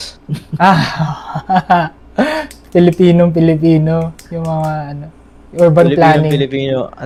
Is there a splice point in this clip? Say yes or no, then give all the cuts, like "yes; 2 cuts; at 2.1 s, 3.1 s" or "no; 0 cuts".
no; 0 cuts